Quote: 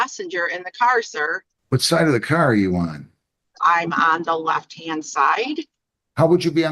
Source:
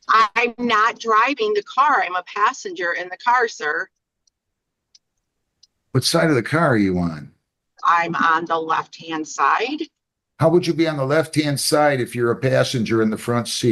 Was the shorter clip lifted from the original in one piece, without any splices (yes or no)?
no